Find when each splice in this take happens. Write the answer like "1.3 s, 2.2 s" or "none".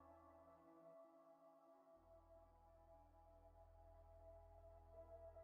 3.7 s

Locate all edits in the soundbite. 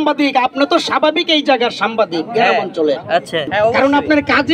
3.5 s

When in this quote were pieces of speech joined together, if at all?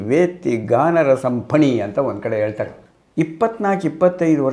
2.8 s

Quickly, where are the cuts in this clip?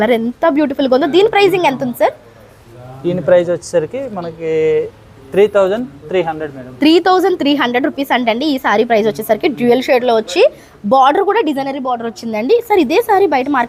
none

